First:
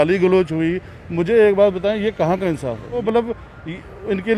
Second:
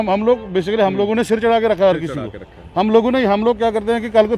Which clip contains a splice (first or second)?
first